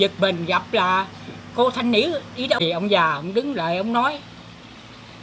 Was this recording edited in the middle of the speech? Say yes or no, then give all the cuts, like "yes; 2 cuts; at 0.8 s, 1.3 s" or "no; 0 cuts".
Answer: yes; 1 cut; at 2.6 s